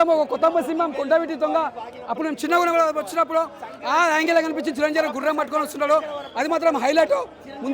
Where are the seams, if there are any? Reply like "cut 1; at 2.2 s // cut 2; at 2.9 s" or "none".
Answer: none